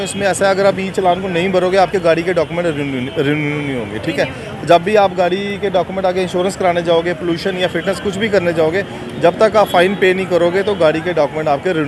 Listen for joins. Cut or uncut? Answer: uncut